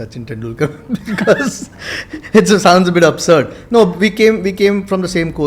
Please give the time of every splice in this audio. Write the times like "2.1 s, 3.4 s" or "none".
none